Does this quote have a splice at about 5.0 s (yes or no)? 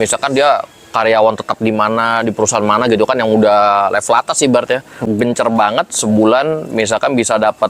yes